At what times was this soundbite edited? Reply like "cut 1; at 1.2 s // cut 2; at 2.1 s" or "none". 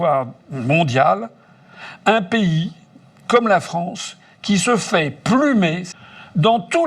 cut 1; at 5.9 s